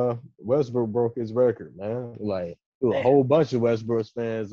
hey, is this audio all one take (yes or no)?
yes